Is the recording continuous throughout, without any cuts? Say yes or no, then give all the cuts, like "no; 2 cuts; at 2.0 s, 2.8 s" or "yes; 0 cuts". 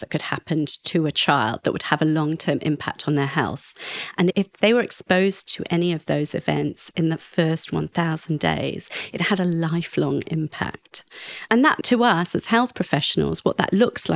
yes; 0 cuts